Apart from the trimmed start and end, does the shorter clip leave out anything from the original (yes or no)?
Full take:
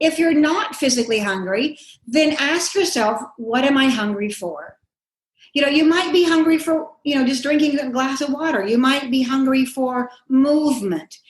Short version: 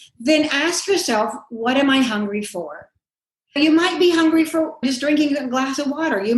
yes